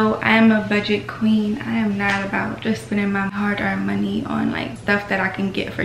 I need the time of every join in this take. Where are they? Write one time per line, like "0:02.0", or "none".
0:03.3
0:04.8

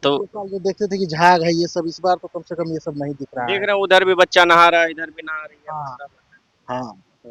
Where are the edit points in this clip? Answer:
none

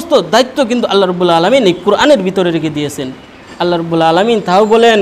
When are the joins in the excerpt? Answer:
0:03.4

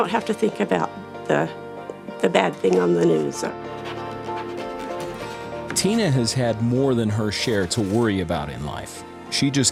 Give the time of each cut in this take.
none

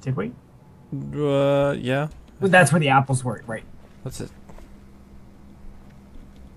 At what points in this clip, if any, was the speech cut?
0:05.6

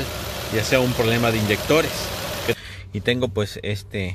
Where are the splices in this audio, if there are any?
0:02.6

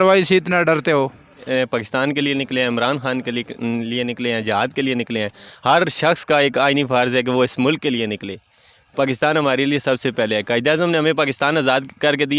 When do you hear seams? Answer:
0:01.4

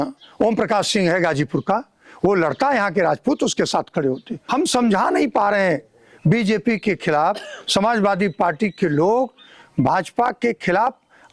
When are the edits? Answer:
0:04.4

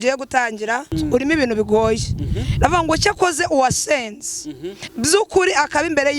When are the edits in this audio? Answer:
0:00.9

